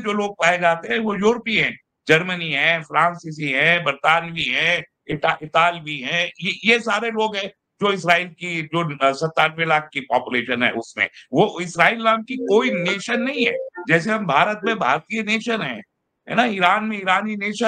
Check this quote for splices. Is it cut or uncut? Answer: uncut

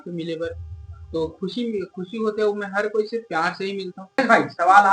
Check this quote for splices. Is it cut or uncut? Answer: cut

